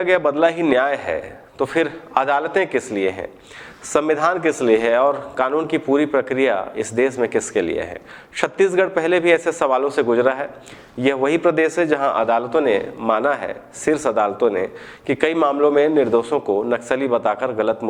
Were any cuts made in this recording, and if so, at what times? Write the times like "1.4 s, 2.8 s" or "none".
none